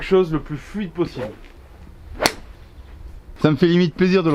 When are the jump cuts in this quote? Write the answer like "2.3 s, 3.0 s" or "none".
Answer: 1.5 s

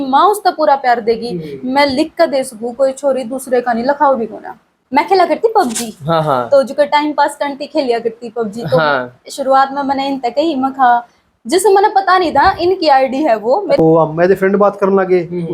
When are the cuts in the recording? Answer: 4.7 s, 13.8 s

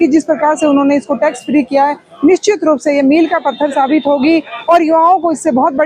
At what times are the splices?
none

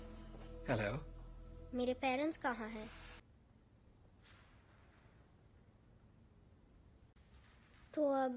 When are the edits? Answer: 3.2 s

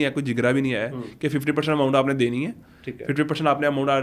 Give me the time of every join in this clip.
none

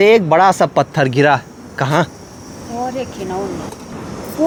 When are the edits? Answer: none

